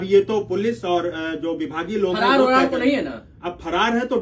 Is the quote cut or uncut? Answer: uncut